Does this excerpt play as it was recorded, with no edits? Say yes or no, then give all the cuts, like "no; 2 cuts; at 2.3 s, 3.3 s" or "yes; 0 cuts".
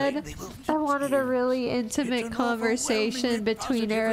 yes; 0 cuts